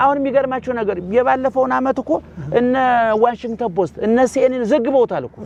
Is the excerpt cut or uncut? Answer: uncut